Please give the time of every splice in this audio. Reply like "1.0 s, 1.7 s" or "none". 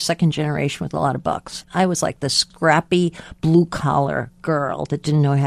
1.6 s, 2.5 s